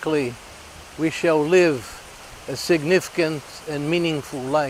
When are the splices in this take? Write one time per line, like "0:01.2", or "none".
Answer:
none